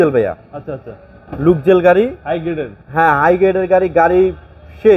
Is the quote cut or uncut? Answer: uncut